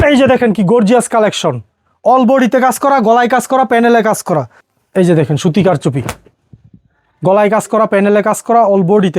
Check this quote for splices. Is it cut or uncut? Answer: cut